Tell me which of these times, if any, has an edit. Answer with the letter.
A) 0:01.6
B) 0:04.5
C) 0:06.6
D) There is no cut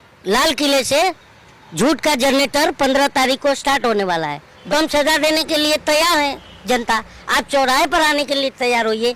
B